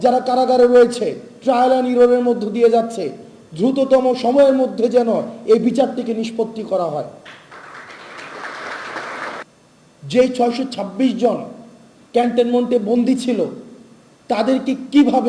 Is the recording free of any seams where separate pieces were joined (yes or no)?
no